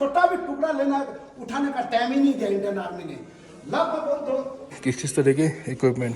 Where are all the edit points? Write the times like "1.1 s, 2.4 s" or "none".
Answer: 4.7 s

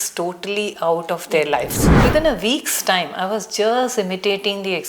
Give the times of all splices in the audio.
1.8 s

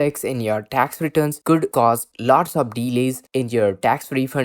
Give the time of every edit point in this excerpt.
1.5 s

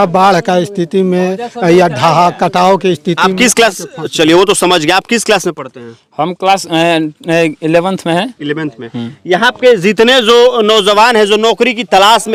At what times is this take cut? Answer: none

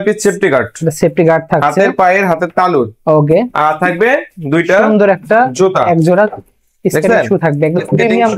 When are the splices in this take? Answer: none

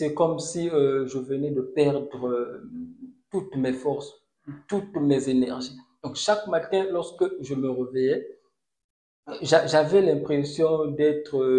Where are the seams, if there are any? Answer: none

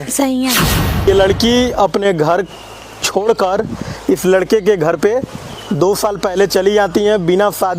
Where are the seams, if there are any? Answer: 1.1 s

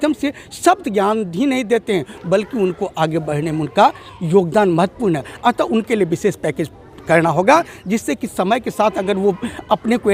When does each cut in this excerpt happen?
none

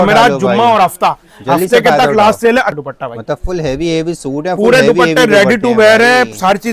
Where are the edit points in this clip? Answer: 2.7 s

